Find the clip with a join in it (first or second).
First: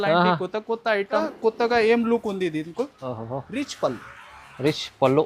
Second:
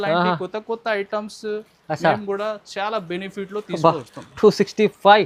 first